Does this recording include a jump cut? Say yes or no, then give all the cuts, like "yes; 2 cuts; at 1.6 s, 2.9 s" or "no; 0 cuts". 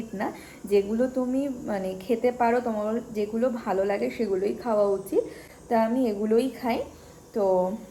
no; 0 cuts